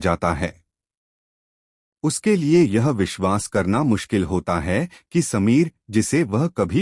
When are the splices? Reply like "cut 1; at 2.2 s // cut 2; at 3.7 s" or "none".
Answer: none